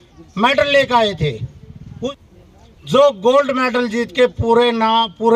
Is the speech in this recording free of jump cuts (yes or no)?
no